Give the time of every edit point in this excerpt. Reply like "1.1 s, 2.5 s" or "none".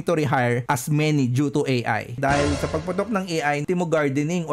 2.2 s, 3.6 s